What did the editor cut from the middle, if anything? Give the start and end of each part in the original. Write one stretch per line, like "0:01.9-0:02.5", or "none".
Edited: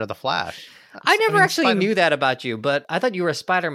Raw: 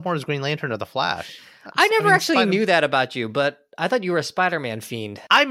0:03.6-0:03.7

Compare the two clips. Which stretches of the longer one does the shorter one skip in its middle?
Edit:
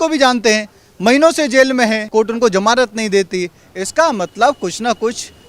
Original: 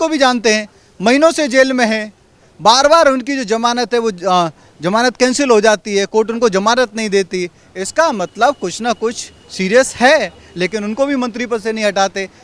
0:02.1-0:06.1

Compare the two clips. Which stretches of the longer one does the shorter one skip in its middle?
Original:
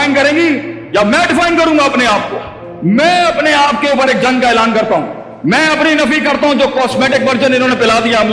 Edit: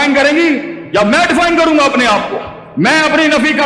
0:02.6-0:05.2

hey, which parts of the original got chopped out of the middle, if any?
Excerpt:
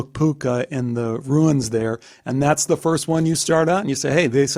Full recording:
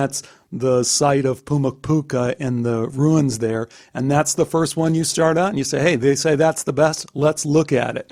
none

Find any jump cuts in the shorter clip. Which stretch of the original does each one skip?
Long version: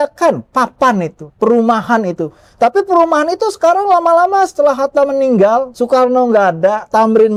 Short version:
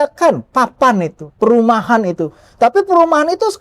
none

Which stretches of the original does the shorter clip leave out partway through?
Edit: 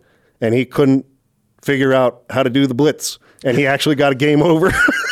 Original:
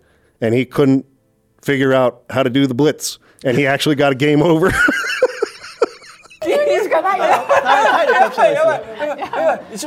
none

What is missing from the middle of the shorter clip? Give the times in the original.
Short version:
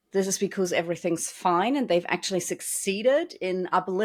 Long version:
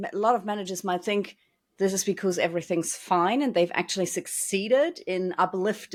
none

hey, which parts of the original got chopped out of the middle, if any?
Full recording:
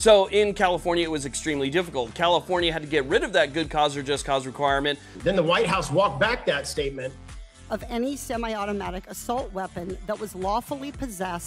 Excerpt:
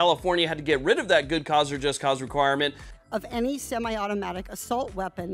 0:05.1-0:07.4

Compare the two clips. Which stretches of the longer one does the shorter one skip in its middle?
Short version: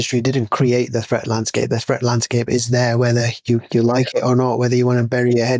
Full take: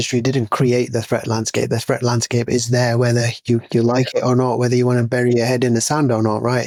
none

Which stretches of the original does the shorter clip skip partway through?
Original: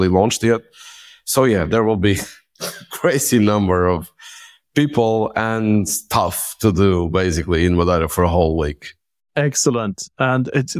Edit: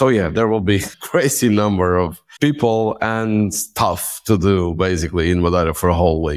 0:02.3-0:02.8
0:04.1-0:04.6

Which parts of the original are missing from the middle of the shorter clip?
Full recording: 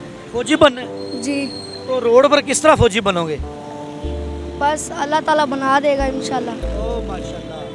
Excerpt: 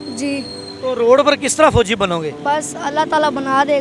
0:03.4-0:04.5

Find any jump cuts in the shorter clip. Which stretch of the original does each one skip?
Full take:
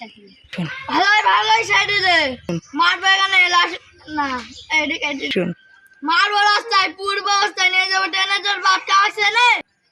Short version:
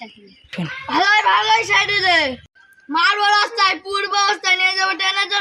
0:02.4-0:05.6

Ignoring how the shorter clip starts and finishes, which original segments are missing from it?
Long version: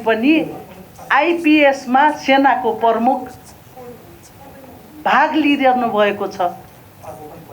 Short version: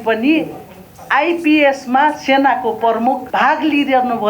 0:03.2-0:05.0

